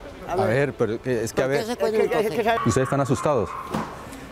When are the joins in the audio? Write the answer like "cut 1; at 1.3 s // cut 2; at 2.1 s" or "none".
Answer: cut 1; at 2.6 s